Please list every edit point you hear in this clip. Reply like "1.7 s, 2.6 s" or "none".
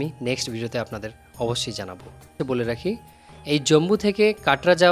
2.4 s